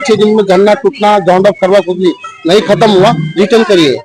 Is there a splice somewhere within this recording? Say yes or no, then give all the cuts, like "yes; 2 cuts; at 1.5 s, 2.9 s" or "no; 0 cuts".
no; 0 cuts